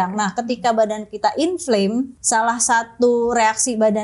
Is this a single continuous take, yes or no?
no